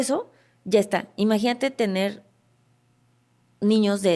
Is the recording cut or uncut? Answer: uncut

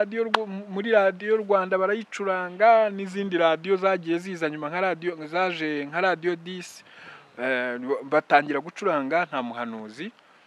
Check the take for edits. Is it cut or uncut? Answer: uncut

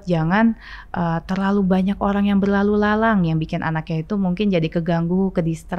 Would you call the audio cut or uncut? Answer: uncut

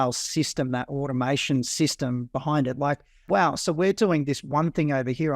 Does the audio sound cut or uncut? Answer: cut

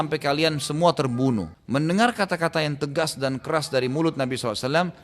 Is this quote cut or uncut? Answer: cut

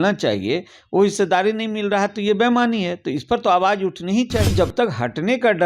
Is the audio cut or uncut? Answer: cut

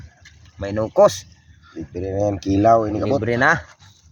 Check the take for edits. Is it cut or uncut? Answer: uncut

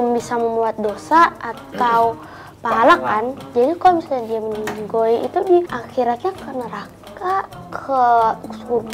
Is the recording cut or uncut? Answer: uncut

